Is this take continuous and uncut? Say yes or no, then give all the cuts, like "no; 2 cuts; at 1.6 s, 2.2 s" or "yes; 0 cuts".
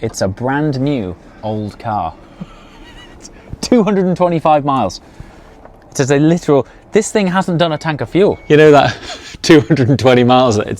no; 1 cut; at 8.4 s